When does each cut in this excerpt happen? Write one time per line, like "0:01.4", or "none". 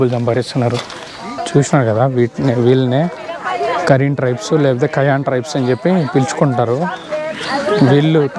0:01.3